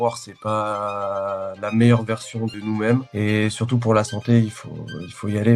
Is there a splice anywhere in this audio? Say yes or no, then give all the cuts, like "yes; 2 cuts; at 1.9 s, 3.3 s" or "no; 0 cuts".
yes; 2 cuts; at 2.6 s, 3.1 s